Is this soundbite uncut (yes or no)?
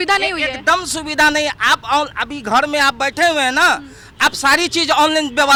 yes